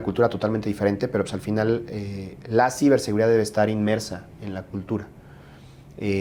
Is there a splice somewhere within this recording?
no; 0 cuts

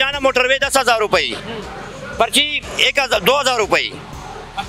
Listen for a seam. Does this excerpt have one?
no; 0 cuts

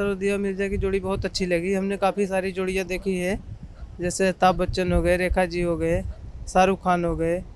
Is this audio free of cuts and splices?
yes; 0 cuts

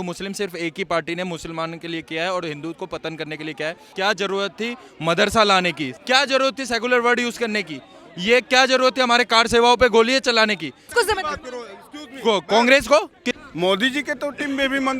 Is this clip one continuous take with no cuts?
no; 4 cuts; at 3.9 s, 5.9 s, 10.8 s, 13.4 s

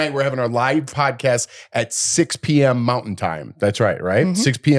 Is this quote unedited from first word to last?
no; 1 cut; at 0.9 s

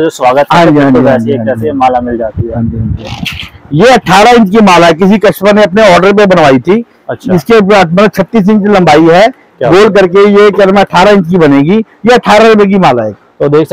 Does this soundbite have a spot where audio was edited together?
no; 0 cuts

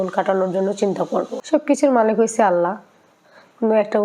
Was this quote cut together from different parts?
yes; 1 cut; at 1.4 s

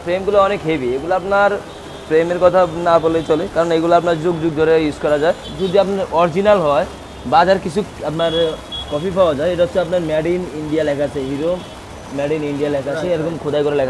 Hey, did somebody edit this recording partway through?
yes; 1 cut; at 5.5 s

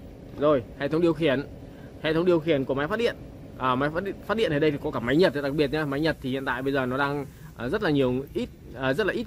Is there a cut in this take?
no; 0 cuts

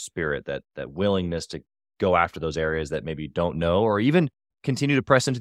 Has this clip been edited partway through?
no; 0 cuts

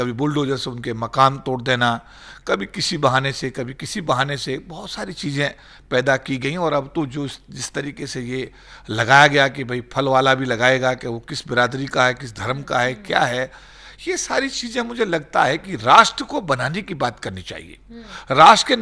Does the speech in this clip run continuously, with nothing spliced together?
yes; 0 cuts

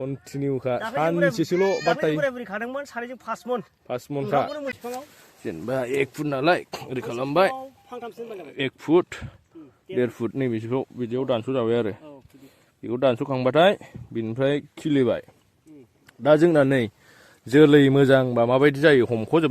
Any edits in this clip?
yes; 1 cut; at 4.7 s

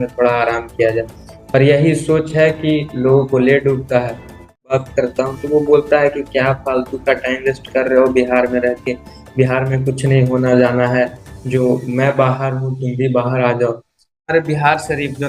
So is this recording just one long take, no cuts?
no; 2 cuts; at 4.7 s, 14.2 s

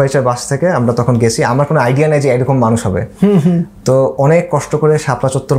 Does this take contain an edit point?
no; 0 cuts

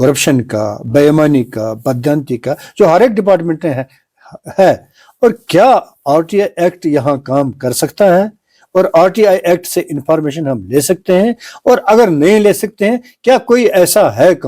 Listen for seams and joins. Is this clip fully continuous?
yes; 0 cuts

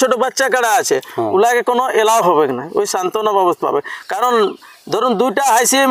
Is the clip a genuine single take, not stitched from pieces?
yes; 0 cuts

